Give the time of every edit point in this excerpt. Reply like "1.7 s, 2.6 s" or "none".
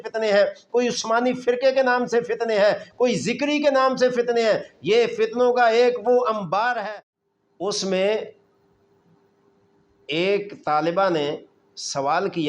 6.9 s